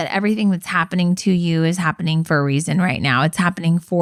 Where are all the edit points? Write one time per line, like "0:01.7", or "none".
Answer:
none